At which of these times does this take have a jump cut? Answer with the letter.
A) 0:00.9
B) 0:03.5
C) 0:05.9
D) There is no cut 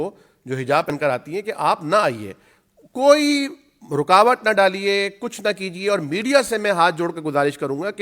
A